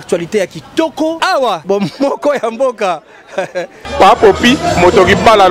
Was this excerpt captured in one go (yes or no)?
no